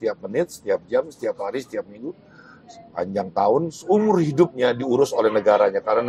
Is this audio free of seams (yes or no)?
yes